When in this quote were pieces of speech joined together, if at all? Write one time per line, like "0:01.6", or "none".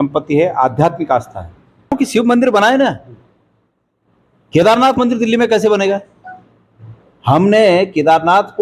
0:02.0